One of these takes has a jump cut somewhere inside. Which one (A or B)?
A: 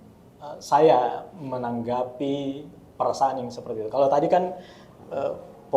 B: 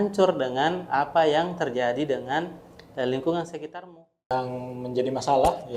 B